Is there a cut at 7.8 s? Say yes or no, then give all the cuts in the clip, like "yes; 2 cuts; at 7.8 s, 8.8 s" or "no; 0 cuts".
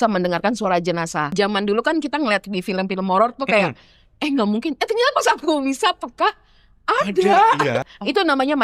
yes; 2 cuts; at 1.3 s, 7.8 s